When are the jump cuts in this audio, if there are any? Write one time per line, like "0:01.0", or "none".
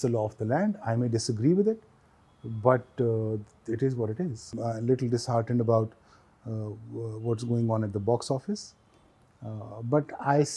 0:04.6

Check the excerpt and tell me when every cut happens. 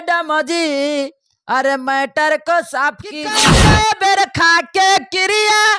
0:03.5

